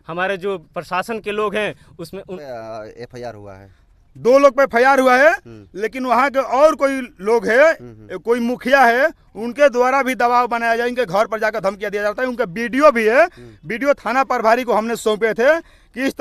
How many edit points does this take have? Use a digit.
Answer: 1